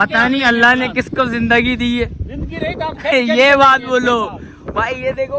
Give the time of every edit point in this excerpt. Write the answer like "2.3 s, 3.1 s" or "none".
none